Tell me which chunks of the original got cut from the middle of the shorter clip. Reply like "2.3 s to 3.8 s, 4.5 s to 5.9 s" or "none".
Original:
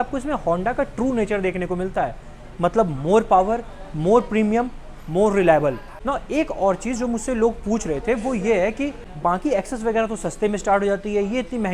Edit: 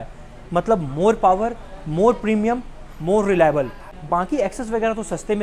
5.9 s to 9.0 s